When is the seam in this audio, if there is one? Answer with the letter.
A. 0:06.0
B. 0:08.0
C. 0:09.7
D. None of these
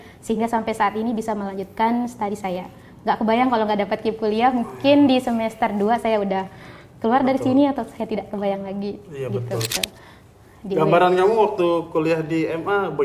C